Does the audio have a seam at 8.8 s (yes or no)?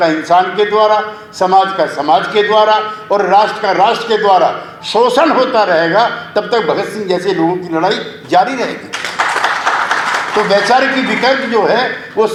no